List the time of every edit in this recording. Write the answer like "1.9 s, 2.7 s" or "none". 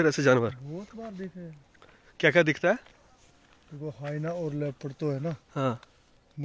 none